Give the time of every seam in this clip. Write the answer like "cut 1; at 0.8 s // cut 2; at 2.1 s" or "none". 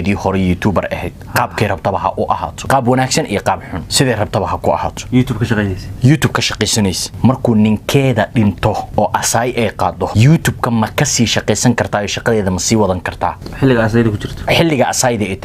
cut 1; at 2.6 s // cut 2; at 3.8 s // cut 3; at 7.1 s // cut 4; at 8.9 s // cut 5; at 10.1 s // cut 6; at 13.4 s // cut 7; at 14.4 s